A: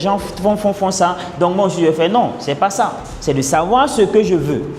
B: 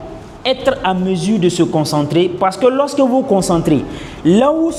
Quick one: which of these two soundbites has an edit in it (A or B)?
A